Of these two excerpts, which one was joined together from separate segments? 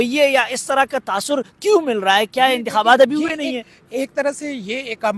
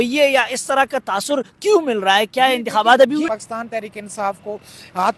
second; 1 cut; at 3.3 s

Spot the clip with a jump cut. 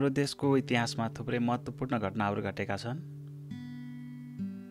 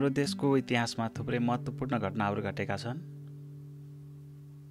second; 1 cut; at 3.0 s

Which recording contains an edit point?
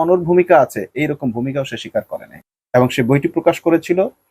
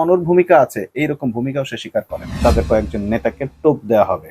second; 1 cut; at 2.3 s

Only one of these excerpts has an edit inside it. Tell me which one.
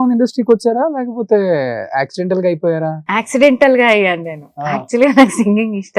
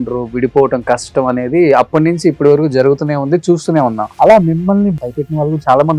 second; 2 cuts; at 4.1 s, 5.0 s

